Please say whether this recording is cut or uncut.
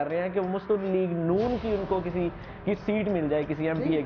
uncut